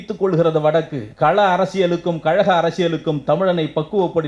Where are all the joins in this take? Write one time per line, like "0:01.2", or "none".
0:01.0